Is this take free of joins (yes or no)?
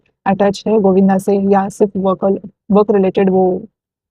yes